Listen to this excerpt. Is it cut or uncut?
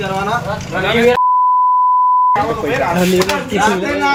uncut